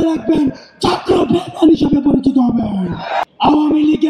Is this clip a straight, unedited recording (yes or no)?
no